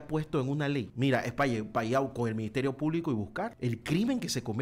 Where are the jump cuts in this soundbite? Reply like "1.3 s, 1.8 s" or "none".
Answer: 0.9 s, 3.5 s